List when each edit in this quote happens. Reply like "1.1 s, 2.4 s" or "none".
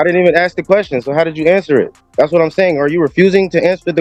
none

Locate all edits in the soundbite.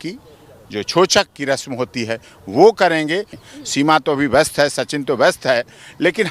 3.3 s

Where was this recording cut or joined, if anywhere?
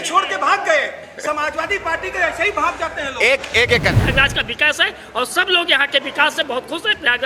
4.0 s

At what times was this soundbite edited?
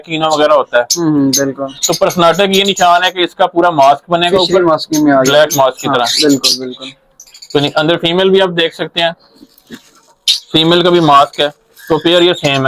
none

